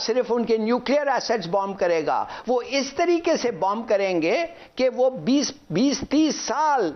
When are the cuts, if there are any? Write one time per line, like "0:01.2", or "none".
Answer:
none

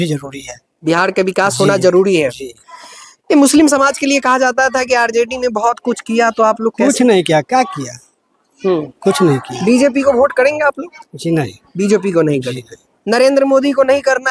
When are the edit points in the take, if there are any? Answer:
none

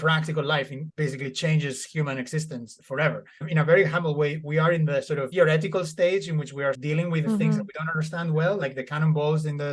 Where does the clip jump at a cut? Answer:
0:00.8
0:03.4
0:06.8

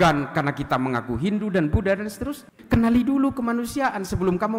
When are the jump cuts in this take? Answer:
0:02.5

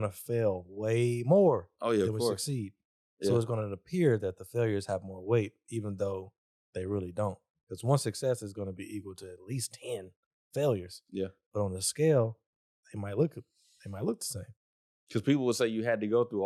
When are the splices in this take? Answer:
none

